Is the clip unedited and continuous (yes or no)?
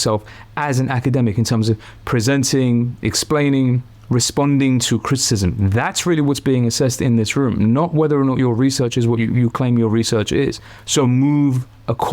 no